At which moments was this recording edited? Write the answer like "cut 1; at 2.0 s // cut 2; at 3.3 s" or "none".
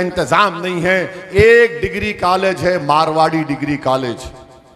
cut 1; at 1.2 s